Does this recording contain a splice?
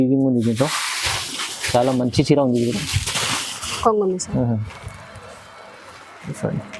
no; 0 cuts

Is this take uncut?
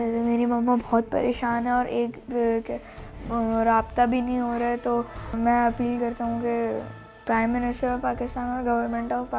yes; 0 cuts

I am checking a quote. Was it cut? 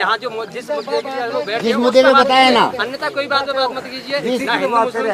no; 0 cuts

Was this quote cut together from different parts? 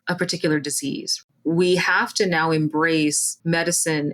yes; 1 cut; at 1.2 s

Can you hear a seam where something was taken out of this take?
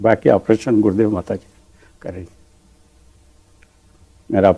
no; 0 cuts

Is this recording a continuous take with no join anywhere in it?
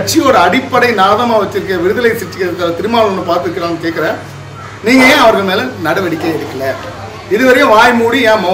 yes; 0 cuts

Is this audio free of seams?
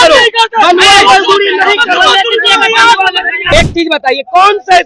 no; 1 cut; at 3.4 s

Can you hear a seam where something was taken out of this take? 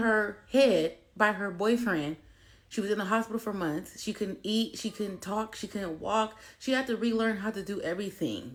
no; 0 cuts

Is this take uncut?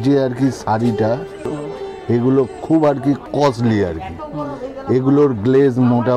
no; 2 cuts; at 1.6 s, 3.2 s

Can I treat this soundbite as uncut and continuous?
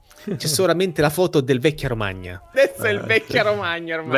no; 1 cut; at 2.5 s

